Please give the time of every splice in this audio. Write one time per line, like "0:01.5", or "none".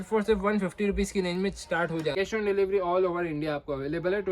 0:02.1